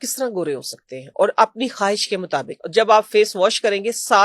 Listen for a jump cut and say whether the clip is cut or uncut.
cut